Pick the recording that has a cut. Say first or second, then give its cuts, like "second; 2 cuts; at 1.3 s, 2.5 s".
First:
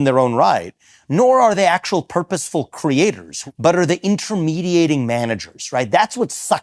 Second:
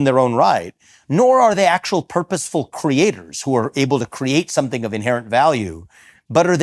first; 1 cut; at 3.3 s